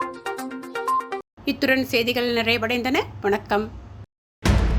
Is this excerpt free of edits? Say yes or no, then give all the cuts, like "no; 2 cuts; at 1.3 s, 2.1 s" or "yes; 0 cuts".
yes; 0 cuts